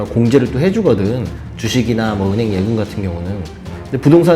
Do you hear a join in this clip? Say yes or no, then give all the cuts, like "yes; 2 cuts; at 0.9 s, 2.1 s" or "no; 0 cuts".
no; 0 cuts